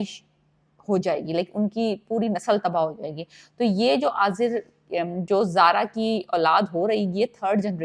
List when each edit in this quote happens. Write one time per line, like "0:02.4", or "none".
none